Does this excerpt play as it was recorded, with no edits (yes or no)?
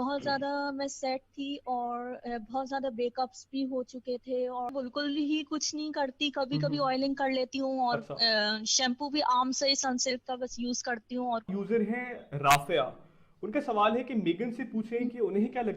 no